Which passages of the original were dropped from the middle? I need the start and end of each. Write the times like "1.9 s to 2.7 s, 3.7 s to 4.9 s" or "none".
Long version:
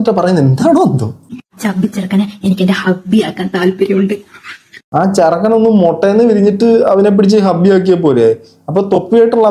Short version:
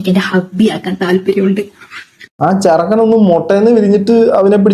none